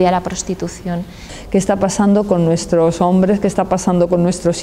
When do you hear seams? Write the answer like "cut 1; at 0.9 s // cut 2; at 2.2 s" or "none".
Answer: cut 1; at 1.2 s